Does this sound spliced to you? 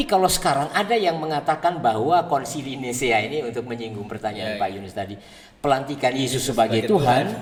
no; 0 cuts

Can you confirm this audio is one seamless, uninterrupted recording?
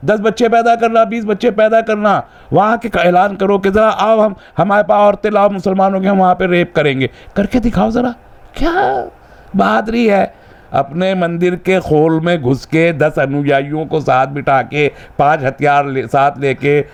yes; 0 cuts

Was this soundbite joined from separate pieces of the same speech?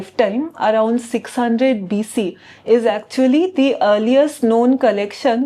no; 0 cuts

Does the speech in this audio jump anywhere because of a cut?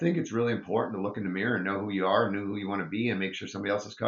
no; 0 cuts

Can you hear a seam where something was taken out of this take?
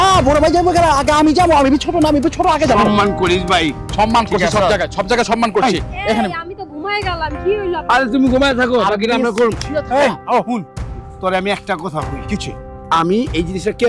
no; 0 cuts

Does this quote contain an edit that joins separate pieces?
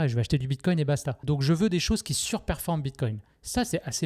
yes; 1 cut; at 1.1 s

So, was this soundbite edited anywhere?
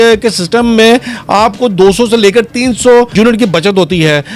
yes; 1 cut; at 3.1 s

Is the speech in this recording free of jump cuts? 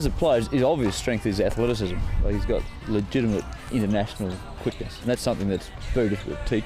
no; 4 cuts; at 2.7 s, 3.6 s, 5.0 s, 5.8 s

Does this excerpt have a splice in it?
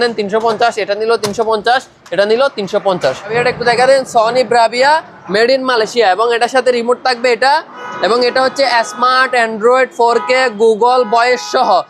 yes; 1 cut; at 3.3 s

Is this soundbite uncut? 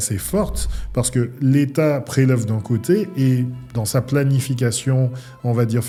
yes; 0 cuts

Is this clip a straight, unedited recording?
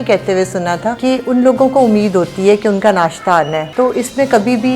no; 2 cuts; at 1.0 s, 3.7 s

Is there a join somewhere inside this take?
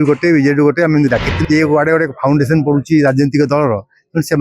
yes; 1 cut; at 1.3 s

